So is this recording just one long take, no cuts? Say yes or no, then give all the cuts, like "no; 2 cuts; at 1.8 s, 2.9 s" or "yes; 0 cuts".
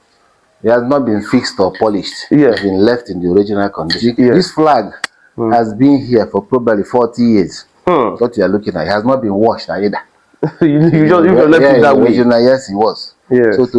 no; 1 cut; at 4.3 s